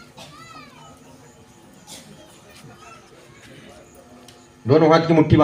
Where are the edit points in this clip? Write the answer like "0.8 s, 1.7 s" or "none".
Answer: none